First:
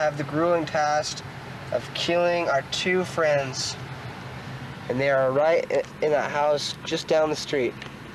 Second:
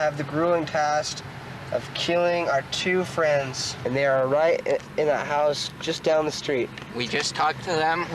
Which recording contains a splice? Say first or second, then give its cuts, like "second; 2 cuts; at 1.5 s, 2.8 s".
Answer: second; 2 cuts; at 3.6 s, 6.8 s